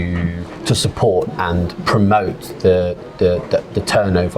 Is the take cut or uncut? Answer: uncut